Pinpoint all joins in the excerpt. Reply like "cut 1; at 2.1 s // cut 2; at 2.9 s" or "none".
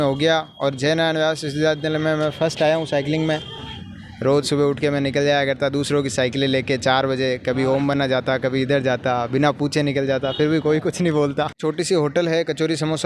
cut 1; at 3.6 s // cut 2; at 11.6 s